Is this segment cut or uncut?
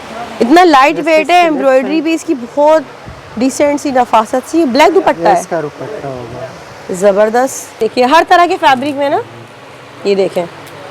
cut